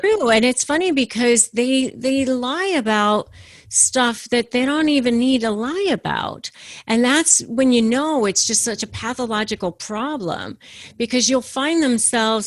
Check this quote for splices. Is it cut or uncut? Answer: uncut